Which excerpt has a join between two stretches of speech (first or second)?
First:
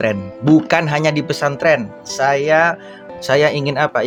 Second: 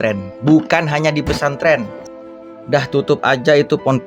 second